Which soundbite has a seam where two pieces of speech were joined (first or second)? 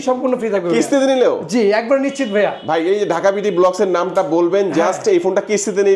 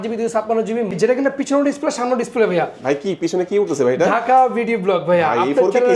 second